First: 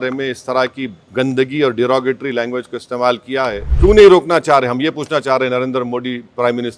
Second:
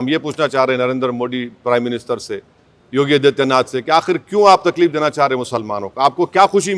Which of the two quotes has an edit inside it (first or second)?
first